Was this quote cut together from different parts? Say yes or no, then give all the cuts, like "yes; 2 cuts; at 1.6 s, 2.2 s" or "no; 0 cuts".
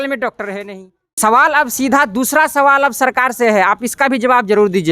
yes; 1 cut; at 1.0 s